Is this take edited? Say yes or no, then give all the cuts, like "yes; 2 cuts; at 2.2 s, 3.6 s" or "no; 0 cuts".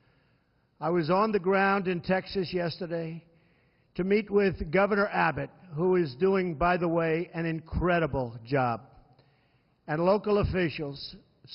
yes; 1 cut; at 4.4 s